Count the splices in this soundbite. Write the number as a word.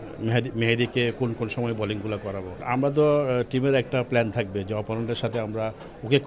one